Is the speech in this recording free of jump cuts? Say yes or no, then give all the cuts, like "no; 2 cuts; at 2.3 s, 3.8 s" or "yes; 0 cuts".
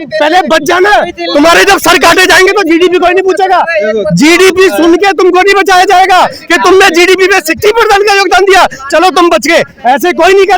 yes; 0 cuts